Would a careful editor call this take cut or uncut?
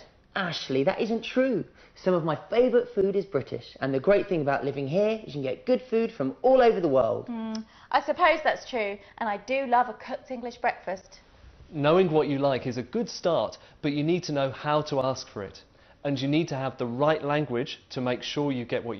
cut